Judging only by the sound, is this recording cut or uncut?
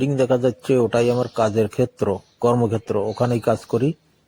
uncut